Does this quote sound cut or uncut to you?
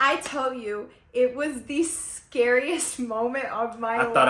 uncut